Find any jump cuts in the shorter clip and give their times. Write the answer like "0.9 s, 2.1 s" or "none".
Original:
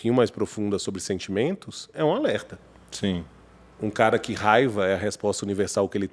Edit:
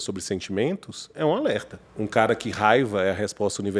1.8 s